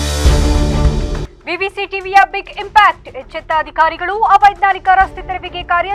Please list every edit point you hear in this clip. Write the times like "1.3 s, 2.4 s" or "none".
0.9 s